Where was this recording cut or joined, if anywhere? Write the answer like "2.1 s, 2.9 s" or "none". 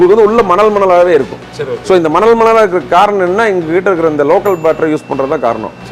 none